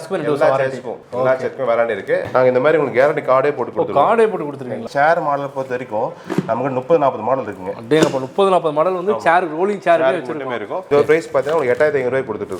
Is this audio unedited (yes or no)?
no